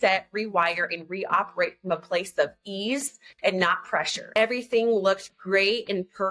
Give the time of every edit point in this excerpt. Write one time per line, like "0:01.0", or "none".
0:04.2